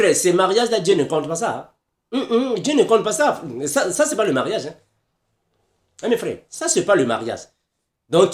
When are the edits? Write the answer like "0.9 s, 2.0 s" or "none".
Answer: none